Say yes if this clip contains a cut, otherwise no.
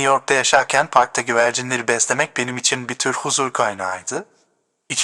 no